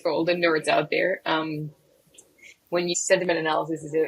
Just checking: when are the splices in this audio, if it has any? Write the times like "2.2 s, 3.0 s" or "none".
2.9 s